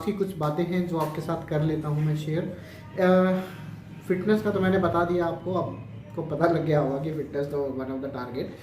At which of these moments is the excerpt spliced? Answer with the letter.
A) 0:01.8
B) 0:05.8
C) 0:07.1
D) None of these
D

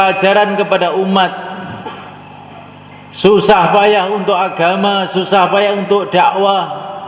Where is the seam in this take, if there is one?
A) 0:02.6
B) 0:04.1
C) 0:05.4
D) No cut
D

